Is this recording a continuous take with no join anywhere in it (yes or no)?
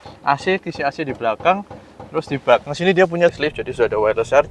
no